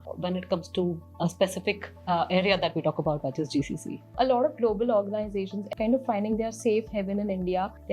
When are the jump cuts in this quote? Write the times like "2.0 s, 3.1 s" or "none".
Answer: 4.1 s